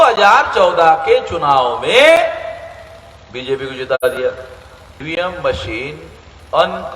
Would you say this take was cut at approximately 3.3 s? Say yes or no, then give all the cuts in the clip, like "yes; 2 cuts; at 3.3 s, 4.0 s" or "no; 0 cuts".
no; 1 cut; at 5.0 s